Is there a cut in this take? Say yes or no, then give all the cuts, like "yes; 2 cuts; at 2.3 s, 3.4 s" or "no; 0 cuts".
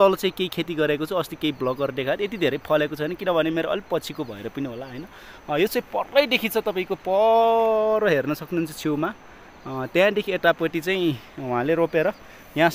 no; 0 cuts